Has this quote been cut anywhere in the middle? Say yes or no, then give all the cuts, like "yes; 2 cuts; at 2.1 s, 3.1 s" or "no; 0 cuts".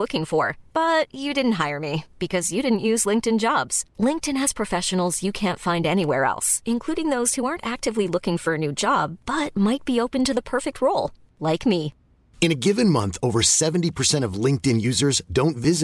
no; 0 cuts